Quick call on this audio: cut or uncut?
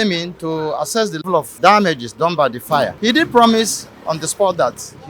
cut